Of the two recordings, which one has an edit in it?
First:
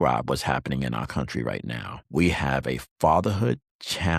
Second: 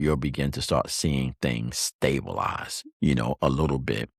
first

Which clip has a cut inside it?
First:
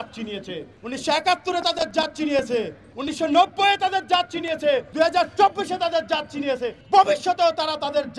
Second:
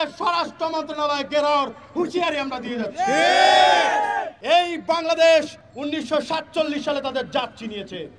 second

